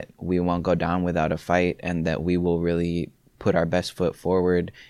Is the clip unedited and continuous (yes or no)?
yes